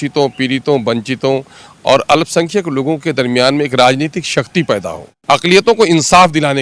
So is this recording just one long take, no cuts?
no; 1 cut; at 5.1 s

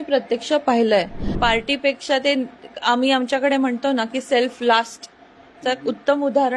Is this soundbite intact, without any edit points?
no; 1 cut; at 1.2 s

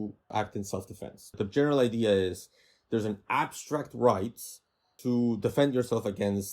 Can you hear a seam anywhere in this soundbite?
yes; 1 cut; at 1.4 s

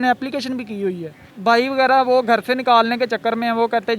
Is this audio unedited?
no; 1 cut; at 1.3 s

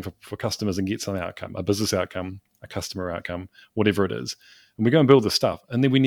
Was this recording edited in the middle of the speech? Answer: no; 0 cuts

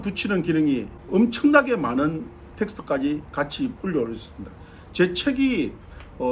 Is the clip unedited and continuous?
no; 1 cut; at 0.9 s

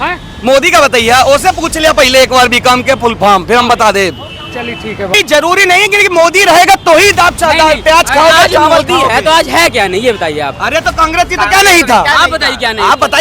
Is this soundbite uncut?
no; 1 cut; at 5.1 s

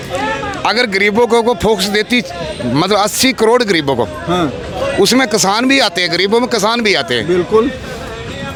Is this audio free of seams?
yes; 0 cuts

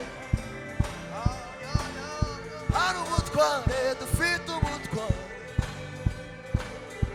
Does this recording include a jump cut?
no; 0 cuts

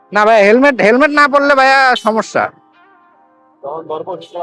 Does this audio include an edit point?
no; 0 cuts

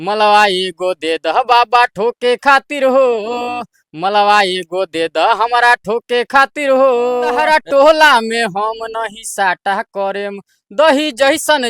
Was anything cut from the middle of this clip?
yes; 1 cut; at 7.4 s

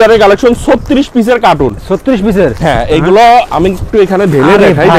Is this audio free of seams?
yes; 0 cuts

